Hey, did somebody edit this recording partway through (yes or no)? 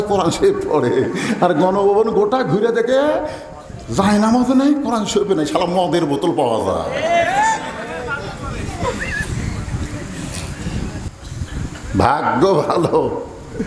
yes